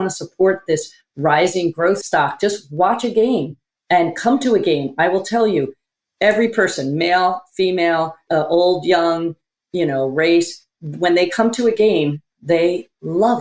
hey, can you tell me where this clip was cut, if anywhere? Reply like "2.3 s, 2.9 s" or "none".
2.0 s, 8.2 s